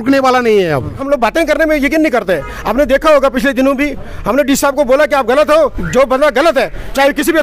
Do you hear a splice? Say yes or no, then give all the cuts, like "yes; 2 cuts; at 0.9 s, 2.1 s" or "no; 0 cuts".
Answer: yes; 1 cut; at 1.0 s